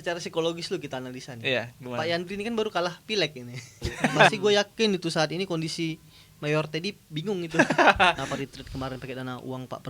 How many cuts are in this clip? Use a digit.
2